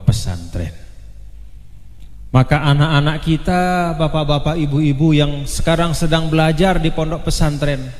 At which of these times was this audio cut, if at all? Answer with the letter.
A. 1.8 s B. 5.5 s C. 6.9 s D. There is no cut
D